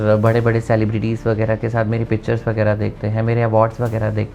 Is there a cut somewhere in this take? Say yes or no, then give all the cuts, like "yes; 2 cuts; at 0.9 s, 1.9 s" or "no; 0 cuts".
no; 0 cuts